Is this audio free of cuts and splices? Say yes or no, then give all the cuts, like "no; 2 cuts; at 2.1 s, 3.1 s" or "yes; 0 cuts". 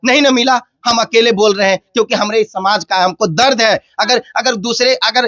yes; 0 cuts